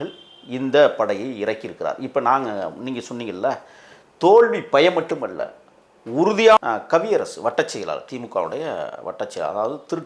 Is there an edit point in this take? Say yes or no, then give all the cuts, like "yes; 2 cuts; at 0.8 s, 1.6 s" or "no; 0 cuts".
yes; 1 cut; at 6.6 s